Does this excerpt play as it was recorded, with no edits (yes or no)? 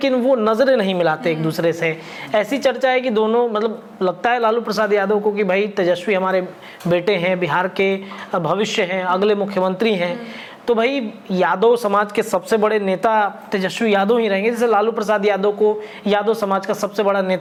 yes